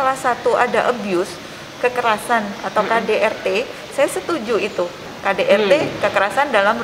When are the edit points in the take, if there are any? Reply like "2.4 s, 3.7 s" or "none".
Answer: 5.1 s